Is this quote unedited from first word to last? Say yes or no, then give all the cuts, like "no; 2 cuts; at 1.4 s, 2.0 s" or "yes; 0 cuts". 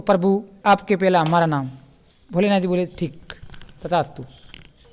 yes; 0 cuts